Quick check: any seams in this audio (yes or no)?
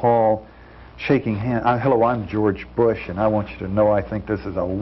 no